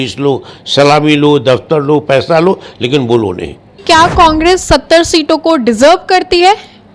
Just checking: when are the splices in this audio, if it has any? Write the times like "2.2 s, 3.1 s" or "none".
3.8 s